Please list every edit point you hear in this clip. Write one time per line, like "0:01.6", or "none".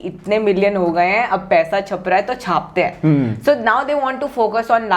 none